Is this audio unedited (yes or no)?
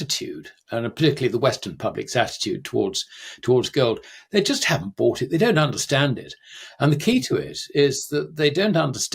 yes